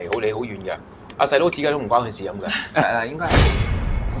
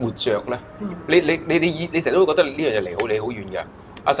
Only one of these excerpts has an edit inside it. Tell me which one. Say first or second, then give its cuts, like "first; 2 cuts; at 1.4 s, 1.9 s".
first; 1 cut; at 2.8 s